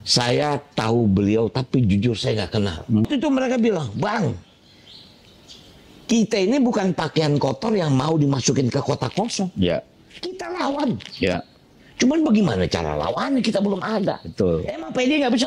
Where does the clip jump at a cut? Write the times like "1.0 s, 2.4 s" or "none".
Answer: 3.1 s